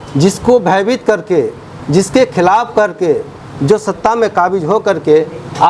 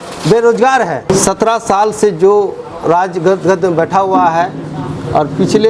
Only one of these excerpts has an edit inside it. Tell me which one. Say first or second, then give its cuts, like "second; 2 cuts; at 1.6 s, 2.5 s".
second; 1 cut; at 1.1 s